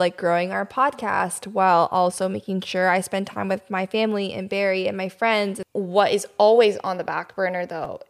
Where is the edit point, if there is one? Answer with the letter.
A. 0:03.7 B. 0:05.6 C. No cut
B